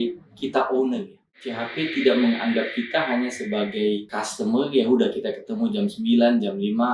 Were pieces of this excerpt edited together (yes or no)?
yes